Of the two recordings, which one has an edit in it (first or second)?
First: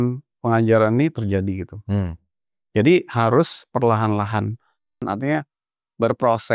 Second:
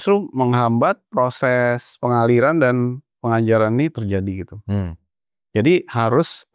first